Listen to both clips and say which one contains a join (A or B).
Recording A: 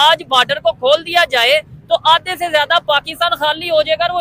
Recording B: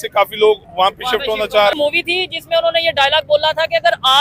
B